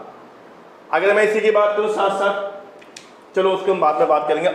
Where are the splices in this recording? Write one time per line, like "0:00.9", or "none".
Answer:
none